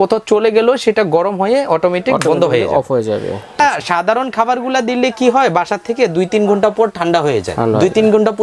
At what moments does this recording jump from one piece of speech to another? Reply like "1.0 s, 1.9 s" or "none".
3.6 s

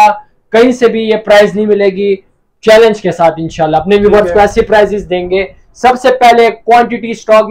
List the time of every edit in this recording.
none

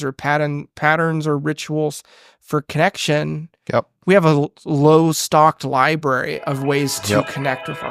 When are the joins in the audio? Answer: none

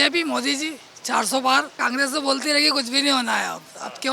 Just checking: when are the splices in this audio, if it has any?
1.7 s

